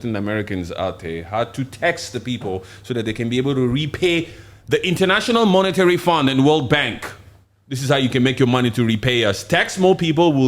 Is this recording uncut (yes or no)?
yes